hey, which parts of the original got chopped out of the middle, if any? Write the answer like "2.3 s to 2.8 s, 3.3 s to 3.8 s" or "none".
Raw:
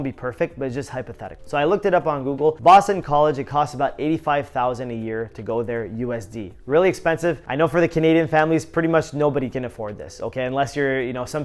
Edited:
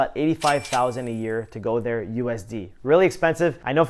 none